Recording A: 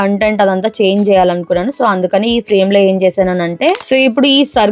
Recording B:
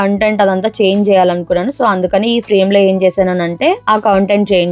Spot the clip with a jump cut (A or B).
A